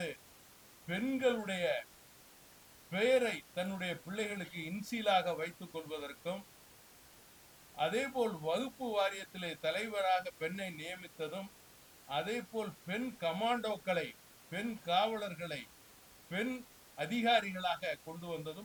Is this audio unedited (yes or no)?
yes